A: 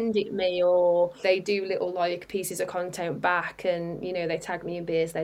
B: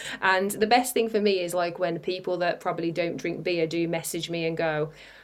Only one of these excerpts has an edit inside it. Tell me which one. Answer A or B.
A